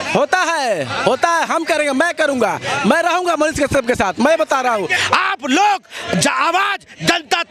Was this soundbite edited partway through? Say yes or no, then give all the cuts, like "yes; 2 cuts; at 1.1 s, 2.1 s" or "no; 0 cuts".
yes; 1 cut; at 5.0 s